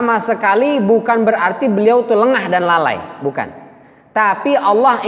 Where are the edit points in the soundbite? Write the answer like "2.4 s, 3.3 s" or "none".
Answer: none